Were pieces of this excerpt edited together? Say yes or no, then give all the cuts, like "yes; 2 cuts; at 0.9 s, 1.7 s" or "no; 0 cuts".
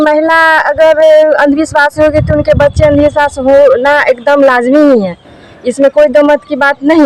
no; 0 cuts